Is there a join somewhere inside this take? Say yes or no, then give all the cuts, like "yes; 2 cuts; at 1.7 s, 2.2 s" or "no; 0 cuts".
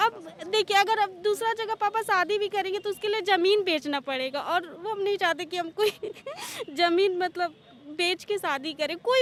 no; 0 cuts